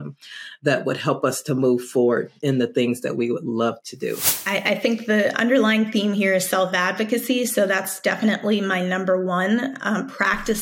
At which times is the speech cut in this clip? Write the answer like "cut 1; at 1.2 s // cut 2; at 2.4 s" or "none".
cut 1; at 4.3 s